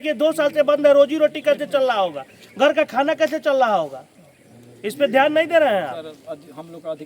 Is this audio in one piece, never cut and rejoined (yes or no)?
yes